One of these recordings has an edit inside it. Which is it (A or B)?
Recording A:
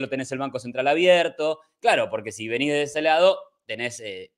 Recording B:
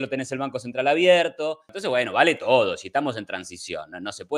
B